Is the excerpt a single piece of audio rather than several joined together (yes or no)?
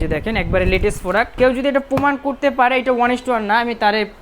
no